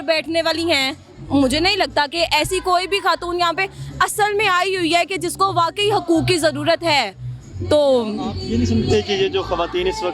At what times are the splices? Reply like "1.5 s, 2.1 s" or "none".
none